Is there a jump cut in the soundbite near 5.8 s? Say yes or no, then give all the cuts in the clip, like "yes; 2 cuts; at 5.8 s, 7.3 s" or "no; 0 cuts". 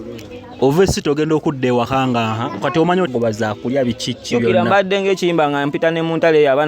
no; 1 cut; at 3.1 s